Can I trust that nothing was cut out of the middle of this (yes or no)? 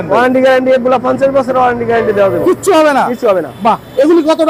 yes